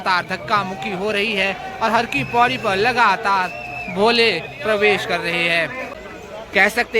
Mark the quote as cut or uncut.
cut